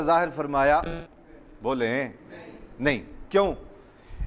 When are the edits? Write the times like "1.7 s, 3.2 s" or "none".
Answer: none